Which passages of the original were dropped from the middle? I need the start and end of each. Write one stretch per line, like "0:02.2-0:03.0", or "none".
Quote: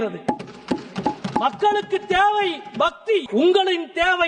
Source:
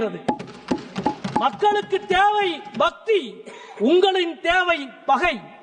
0:03.3-0:03.7